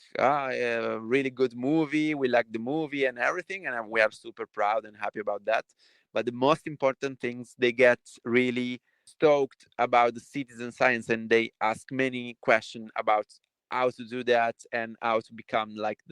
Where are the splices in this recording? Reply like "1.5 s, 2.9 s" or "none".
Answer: 9.0 s